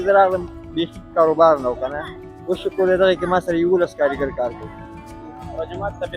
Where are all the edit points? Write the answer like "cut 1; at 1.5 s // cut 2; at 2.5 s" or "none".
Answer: cut 1; at 5.3 s

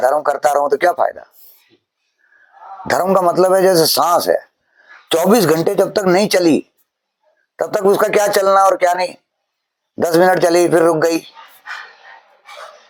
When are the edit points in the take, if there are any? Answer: none

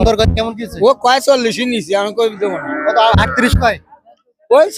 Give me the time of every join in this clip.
none

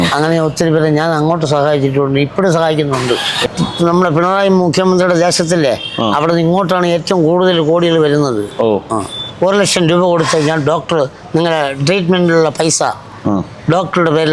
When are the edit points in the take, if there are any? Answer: cut 1; at 3.5 s // cut 2; at 9.2 s

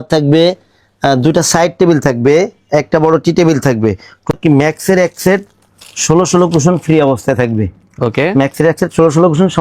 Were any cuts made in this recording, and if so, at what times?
cut 1; at 4.3 s

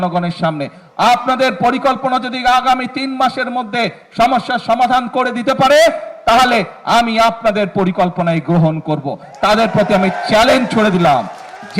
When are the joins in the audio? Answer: none

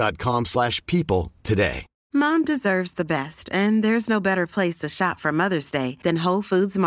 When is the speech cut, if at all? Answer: cut 1; at 1.9 s

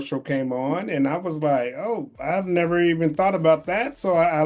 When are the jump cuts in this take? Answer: cut 1; at 2.1 s

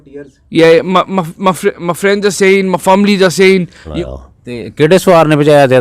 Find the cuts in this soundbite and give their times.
cut 1; at 3.8 s

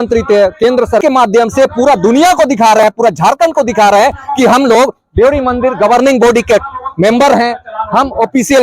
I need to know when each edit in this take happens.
cut 1; at 1.0 s

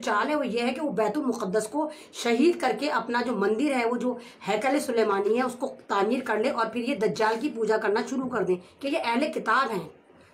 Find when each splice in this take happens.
cut 1; at 8.7 s

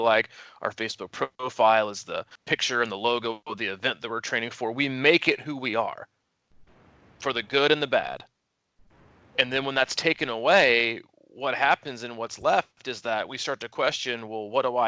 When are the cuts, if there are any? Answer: cut 1; at 2.3 s

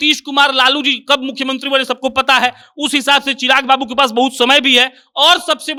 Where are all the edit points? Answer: none

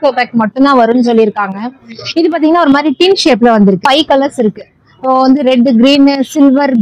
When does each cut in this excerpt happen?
cut 1; at 3.8 s

